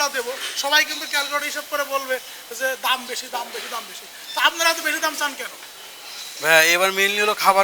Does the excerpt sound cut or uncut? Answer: uncut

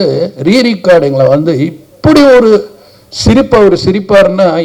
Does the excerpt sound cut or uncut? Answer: uncut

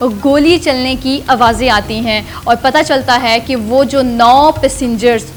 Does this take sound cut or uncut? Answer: uncut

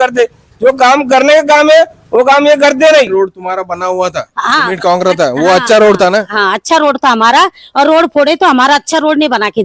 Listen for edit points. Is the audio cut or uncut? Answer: cut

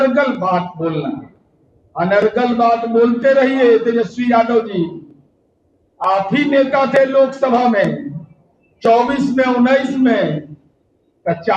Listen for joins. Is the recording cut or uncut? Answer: uncut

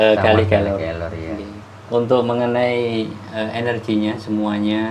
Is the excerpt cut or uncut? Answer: cut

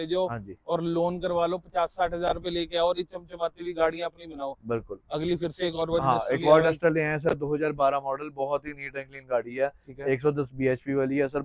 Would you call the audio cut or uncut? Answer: uncut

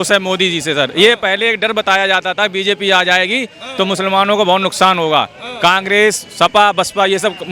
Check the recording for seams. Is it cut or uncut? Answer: uncut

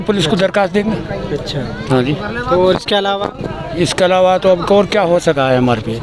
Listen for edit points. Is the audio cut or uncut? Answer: uncut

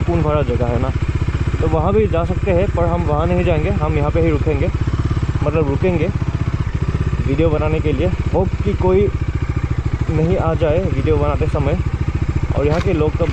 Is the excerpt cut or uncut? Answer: uncut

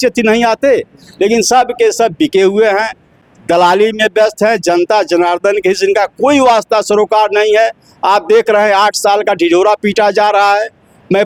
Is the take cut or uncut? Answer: uncut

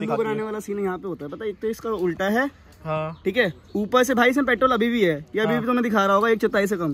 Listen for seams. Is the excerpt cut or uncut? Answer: uncut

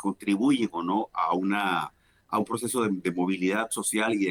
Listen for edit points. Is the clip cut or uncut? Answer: uncut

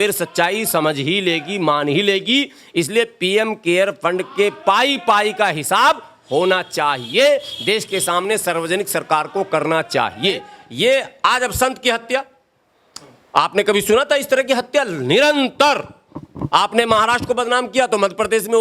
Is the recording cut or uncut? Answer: cut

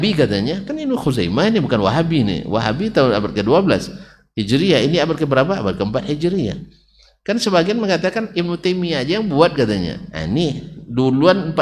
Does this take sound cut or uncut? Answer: uncut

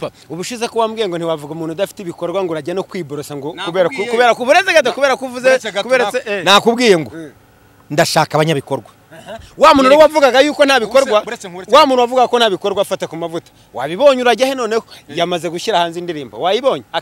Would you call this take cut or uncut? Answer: uncut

